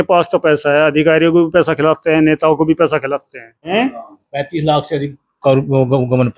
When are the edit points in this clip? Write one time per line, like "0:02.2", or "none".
0:03.7

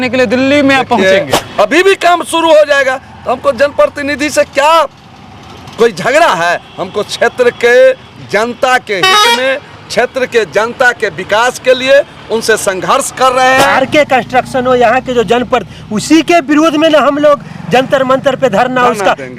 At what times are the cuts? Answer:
0:01.4
0:13.7

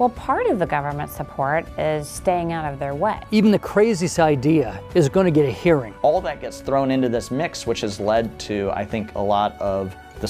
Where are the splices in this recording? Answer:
0:03.2
0:05.9

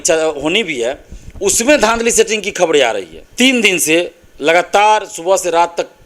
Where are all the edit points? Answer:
0:03.2

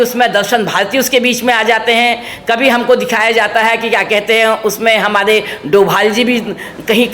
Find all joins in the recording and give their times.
none

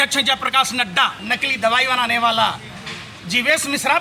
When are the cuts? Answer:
0:01.3

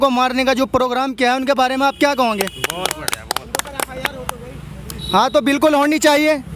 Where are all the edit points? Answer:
none

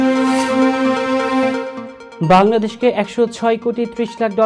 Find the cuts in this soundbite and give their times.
0:01.7

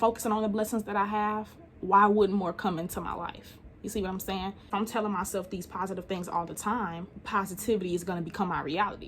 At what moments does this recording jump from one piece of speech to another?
0:04.6

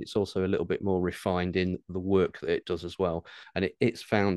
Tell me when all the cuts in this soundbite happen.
0:03.4

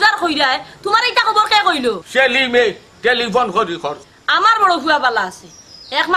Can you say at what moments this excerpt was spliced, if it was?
0:02.0
0:03.9

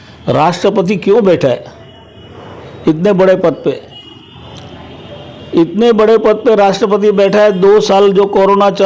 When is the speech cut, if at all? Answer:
none

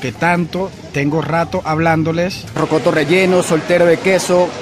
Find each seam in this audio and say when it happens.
0:02.5

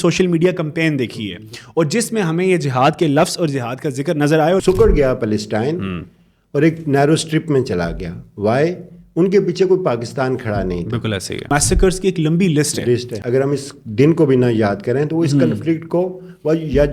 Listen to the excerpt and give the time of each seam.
0:04.6
0:11.5
0:13.1

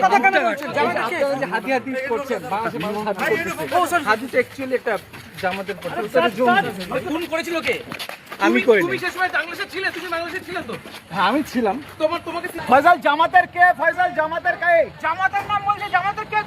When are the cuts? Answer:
0:12.6

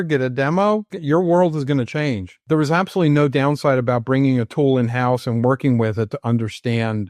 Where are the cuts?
0:00.9
0:02.3

